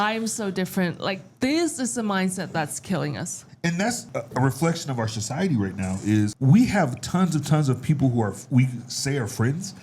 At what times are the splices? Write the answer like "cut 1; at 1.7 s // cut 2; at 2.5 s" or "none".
cut 1; at 3.9 s // cut 2; at 6.4 s